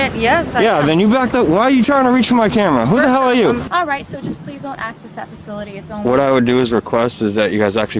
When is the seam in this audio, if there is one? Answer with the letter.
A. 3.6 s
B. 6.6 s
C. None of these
A